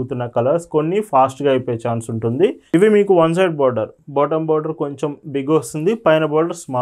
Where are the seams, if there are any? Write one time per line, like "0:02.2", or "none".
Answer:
0:02.6